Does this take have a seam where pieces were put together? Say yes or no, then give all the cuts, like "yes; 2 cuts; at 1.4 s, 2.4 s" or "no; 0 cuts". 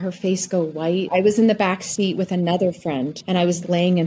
yes; 1 cut; at 1.1 s